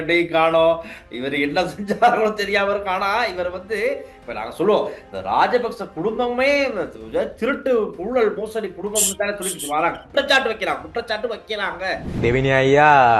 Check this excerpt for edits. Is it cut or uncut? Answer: cut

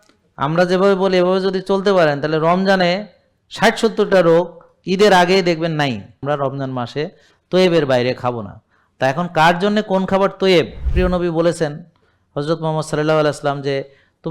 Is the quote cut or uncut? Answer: cut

